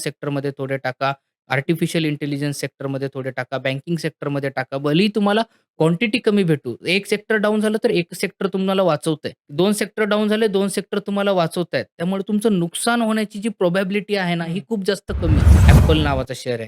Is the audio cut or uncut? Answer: cut